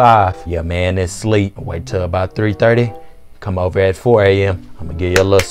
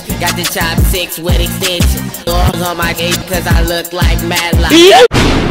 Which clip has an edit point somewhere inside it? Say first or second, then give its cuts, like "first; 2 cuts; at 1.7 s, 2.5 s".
first; 1 cut; at 1.7 s